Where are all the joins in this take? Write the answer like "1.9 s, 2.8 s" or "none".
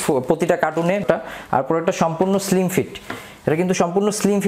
1.0 s